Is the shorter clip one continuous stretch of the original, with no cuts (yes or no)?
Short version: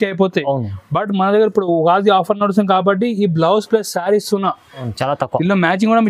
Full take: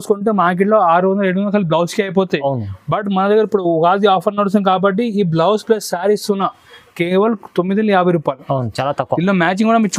no